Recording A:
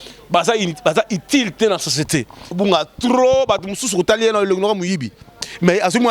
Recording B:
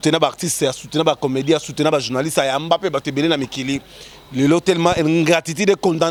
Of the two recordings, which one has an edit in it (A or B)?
A